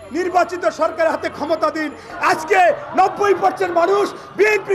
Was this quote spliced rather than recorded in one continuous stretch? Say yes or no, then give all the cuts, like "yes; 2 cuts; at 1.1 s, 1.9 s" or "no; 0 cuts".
yes; 1 cut; at 2.1 s